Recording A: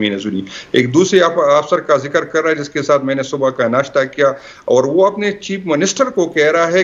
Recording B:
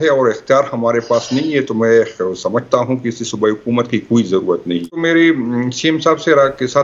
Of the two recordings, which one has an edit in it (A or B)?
B